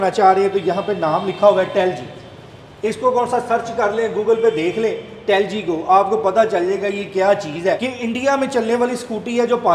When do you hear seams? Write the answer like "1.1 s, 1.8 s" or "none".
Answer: 7.8 s